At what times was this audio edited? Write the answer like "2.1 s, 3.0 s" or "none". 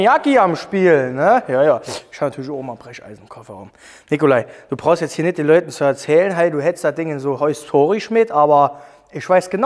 none